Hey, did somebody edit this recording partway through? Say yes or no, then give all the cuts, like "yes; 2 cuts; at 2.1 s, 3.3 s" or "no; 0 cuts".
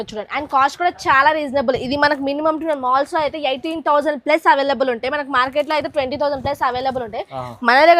no; 0 cuts